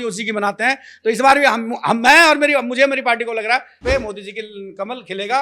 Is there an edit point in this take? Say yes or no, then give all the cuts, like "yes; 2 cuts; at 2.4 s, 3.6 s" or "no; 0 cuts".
yes; 1 cut; at 3.8 s